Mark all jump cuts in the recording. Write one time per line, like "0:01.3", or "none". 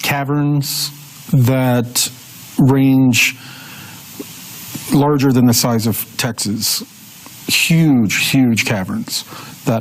0:03.3